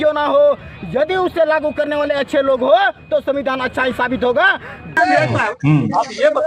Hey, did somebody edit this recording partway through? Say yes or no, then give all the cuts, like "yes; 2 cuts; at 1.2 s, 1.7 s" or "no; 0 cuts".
yes; 1 cut; at 5.0 s